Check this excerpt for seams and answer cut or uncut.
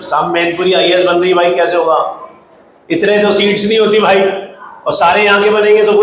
uncut